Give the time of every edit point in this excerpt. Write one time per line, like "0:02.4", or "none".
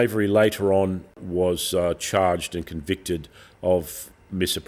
0:01.2